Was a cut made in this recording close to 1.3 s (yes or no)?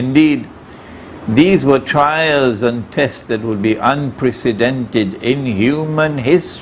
no